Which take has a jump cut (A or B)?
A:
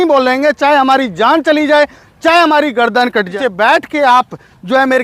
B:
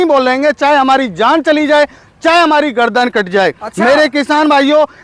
A